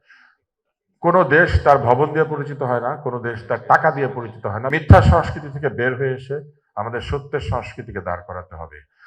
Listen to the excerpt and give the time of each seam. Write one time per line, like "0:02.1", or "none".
0:04.7